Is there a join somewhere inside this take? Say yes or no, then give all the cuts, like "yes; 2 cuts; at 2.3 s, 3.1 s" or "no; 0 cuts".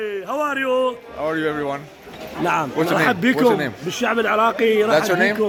no; 0 cuts